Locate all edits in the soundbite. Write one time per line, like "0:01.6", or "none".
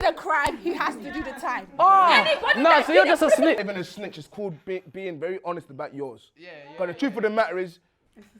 0:03.6

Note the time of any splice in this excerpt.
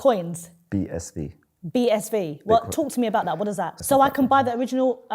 0:03.7

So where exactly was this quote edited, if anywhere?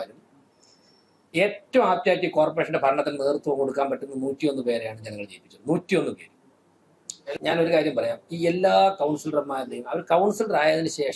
0:07.3

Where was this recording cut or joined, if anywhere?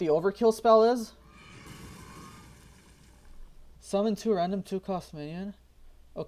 none

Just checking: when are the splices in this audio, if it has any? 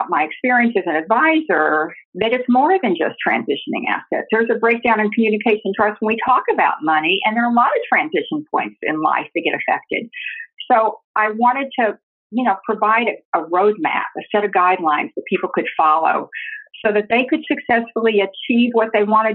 0:02.0

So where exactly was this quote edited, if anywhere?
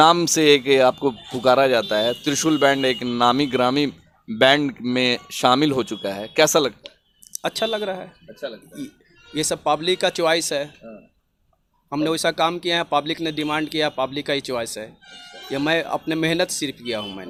none

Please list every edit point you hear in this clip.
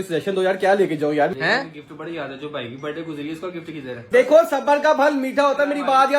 0:01.3
0:03.9

